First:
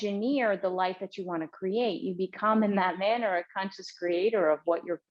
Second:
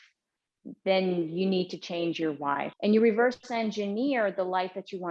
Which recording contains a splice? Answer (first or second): second